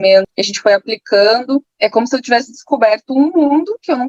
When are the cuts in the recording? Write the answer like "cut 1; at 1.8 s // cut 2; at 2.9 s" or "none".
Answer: none